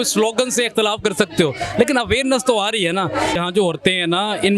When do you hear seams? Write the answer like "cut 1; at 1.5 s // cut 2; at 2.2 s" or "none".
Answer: cut 1; at 3.4 s